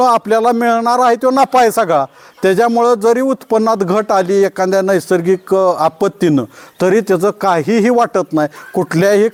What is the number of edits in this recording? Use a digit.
0